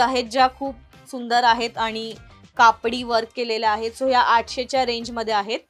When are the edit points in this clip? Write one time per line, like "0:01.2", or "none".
none